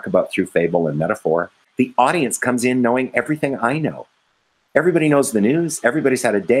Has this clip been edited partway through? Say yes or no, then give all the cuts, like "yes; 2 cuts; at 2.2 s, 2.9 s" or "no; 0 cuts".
yes; 1 cut; at 1.6 s